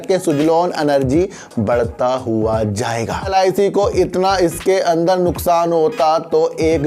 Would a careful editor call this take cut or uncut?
cut